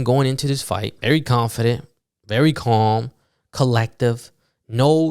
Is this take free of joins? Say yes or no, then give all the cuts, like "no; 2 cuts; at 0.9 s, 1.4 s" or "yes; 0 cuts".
no; 1 cut; at 0.9 s